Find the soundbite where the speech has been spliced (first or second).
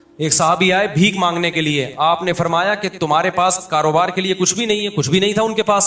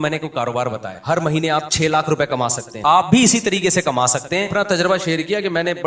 second